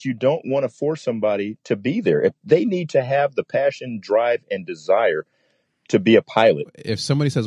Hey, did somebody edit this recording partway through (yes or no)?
no